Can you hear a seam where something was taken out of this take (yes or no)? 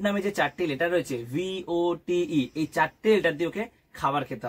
no